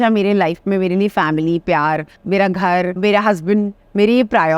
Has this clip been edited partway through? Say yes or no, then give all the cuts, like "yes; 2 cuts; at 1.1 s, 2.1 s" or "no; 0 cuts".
yes; 2 cuts; at 2.2 s, 3.0 s